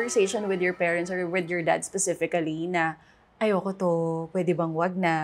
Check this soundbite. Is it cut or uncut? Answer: uncut